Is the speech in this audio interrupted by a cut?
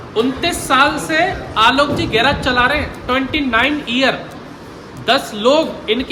no; 0 cuts

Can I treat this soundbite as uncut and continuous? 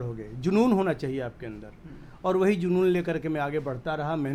yes; 0 cuts

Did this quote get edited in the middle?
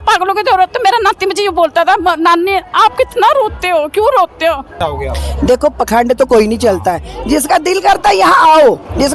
yes; 1 cut; at 4.7 s

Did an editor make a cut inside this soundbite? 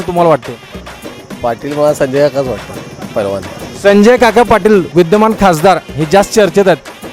yes; 1 cut; at 3.6 s

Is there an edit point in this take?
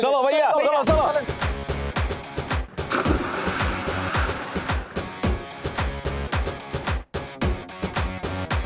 no; 0 cuts

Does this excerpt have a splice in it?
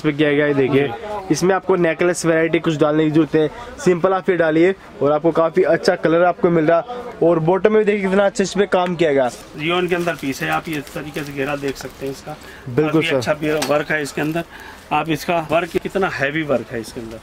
yes; 2 cuts; at 9.5 s, 15.9 s

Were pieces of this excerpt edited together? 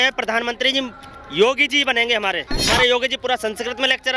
yes; 1 cut; at 2.6 s

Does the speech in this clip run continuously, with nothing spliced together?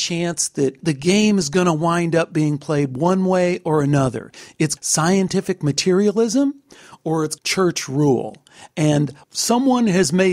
no; 4 cuts; at 0.8 s, 4.7 s, 7.4 s, 9.2 s

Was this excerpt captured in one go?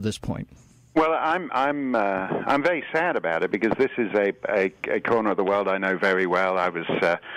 no; 1 cut; at 3.2 s

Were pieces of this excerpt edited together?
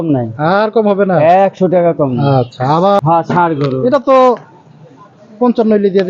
yes; 1 cut; at 3.0 s

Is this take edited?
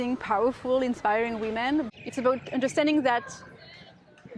yes; 1 cut; at 1.9 s

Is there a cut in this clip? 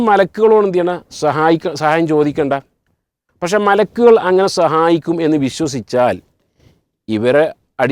no; 0 cuts

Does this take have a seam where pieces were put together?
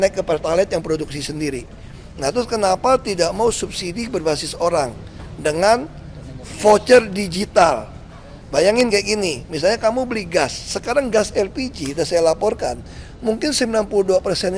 no; 0 cuts

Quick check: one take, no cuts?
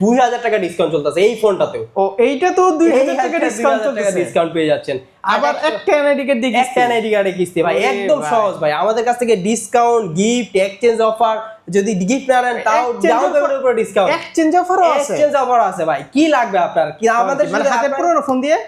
yes; 0 cuts

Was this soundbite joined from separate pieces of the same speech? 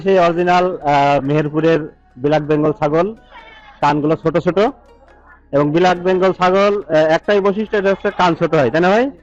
no; 0 cuts

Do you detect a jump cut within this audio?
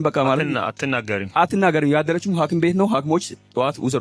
no; 0 cuts

